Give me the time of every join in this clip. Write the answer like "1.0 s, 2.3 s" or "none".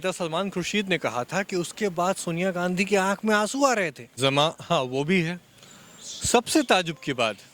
4.0 s